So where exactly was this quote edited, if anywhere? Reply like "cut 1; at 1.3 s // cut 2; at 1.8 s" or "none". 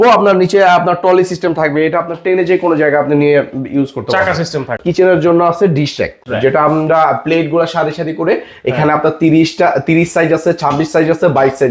cut 1; at 4.8 s // cut 2; at 6.2 s